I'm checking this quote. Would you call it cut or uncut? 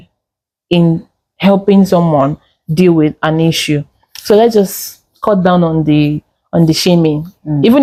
uncut